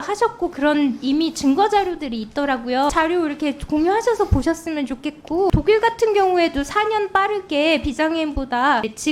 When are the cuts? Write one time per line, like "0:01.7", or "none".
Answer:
0:02.9